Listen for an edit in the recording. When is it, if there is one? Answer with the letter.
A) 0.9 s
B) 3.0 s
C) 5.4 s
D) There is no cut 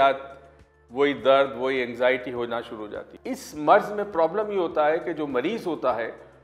B